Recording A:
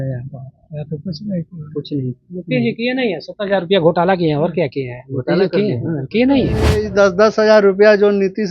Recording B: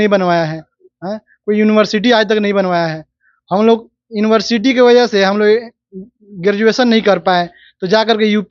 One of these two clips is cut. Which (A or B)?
A